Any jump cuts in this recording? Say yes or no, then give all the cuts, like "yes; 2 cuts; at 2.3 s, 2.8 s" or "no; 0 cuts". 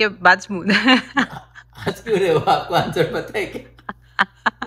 no; 0 cuts